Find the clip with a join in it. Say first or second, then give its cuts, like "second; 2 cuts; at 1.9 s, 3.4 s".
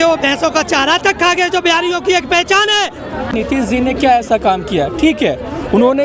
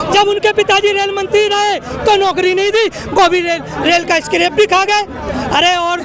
first; 1 cut; at 3.3 s